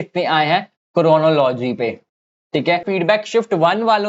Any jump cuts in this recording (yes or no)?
yes